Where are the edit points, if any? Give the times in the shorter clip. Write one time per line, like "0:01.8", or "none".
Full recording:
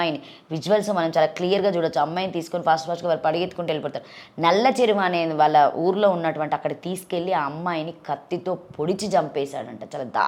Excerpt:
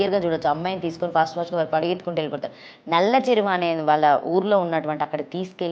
none